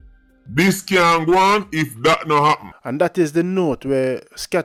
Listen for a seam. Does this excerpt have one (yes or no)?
no